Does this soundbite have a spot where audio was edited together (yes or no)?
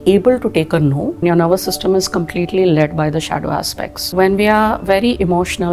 yes